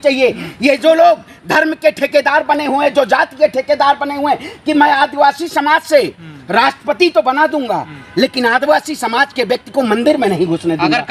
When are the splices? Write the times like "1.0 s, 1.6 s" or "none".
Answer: none